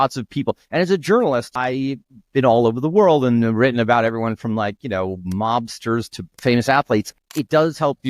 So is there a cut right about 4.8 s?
no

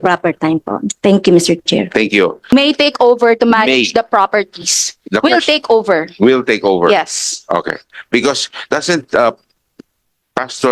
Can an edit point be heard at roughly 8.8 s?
no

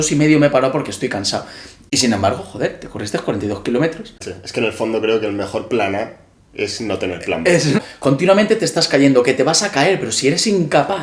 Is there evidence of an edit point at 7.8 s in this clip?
yes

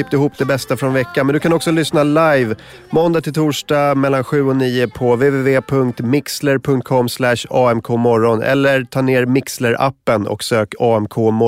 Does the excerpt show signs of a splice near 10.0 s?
no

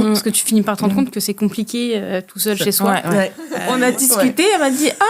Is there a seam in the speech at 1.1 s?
no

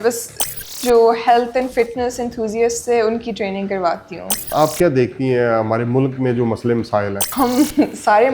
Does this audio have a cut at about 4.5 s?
yes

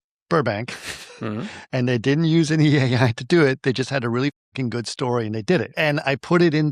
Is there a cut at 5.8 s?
yes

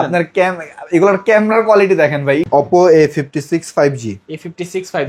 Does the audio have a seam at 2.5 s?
yes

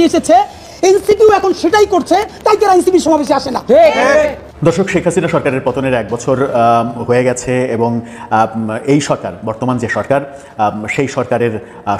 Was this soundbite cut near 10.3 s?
no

